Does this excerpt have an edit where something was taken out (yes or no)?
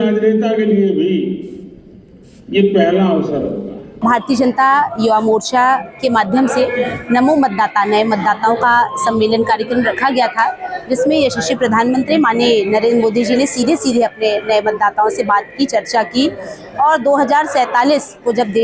yes